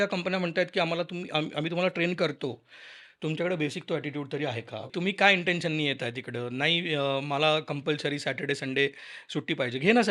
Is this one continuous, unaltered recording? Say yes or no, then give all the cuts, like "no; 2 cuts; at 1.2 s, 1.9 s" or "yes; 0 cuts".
no; 1 cut; at 4.8 s